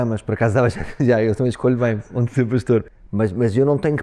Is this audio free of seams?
no; 1 cut; at 3.0 s

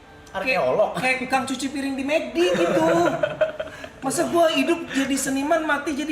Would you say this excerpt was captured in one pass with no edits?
yes; 0 cuts

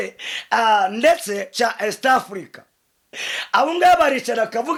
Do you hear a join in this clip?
no; 0 cuts

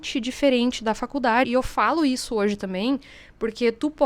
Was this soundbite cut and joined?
yes; 1 cut; at 1.5 s

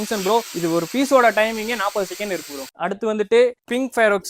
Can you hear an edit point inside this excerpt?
no; 0 cuts

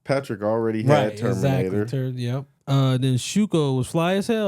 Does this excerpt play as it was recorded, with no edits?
no; 1 cut; at 2.5 s

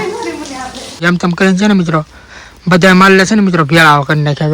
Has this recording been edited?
yes; 1 cut; at 1.0 s

